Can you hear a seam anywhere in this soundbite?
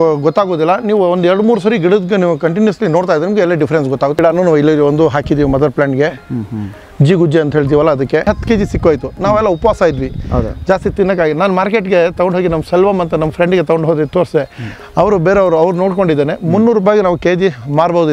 yes; 2 cuts; at 4.2 s, 8.2 s

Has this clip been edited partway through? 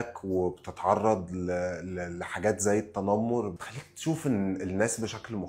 no; 0 cuts

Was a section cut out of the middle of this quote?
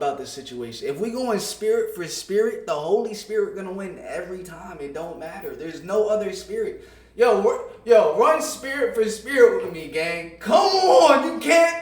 no; 0 cuts

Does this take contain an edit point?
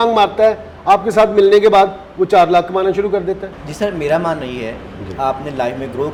no; 0 cuts

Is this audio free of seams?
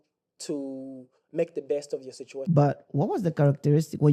no; 1 cut; at 2.3 s

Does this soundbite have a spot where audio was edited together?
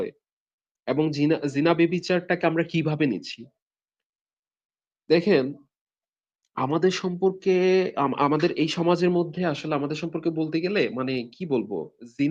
no; 0 cuts

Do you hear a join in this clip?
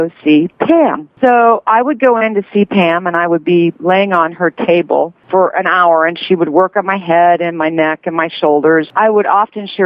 yes; 2 cuts; at 1.1 s, 5.2 s

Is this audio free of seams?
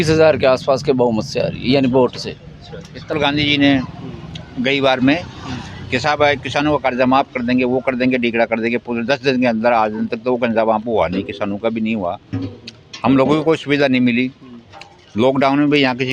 no; 1 cut; at 3.1 s

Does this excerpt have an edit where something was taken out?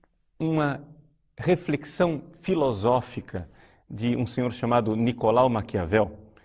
yes; 1 cut; at 2.3 s

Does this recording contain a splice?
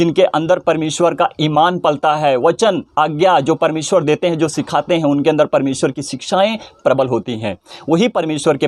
no; 0 cuts

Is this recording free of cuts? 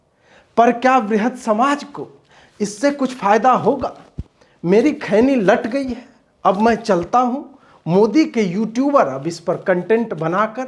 yes; 0 cuts

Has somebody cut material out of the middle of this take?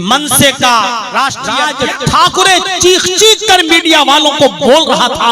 yes; 1 cut; at 1.6 s

